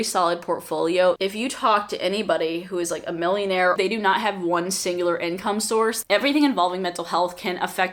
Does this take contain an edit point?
yes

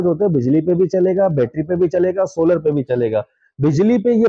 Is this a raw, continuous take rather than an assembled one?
yes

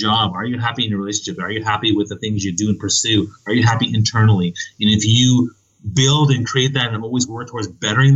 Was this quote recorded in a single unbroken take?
yes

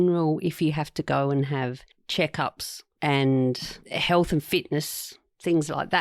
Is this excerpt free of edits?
yes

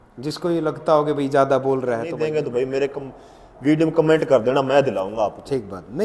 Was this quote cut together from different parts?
yes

